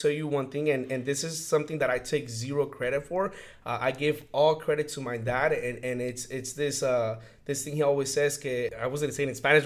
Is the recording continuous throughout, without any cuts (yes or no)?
no